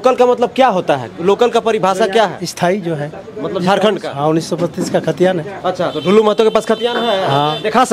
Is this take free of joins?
yes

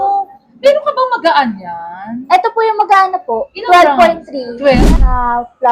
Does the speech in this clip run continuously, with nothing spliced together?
no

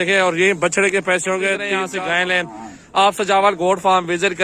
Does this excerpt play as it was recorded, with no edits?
no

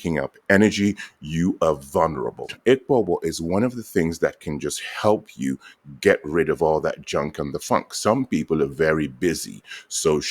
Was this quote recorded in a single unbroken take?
no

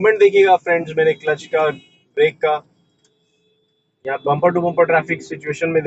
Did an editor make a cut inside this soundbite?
no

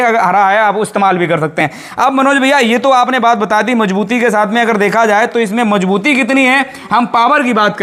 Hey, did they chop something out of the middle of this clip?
no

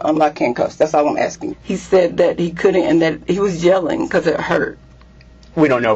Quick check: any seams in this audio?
yes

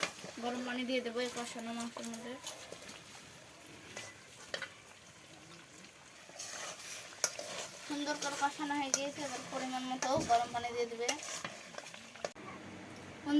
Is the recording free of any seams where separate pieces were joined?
no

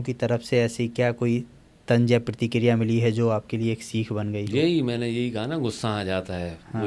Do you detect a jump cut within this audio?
no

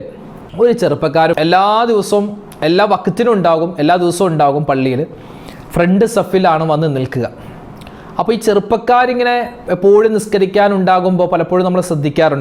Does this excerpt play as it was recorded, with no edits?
no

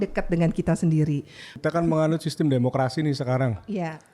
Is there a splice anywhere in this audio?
yes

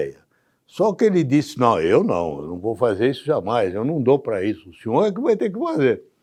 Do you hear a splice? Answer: no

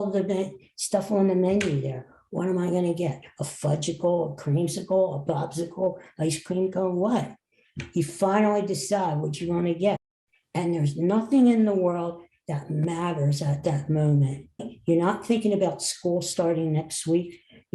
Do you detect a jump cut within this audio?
yes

